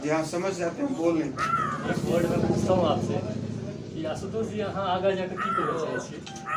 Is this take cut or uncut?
cut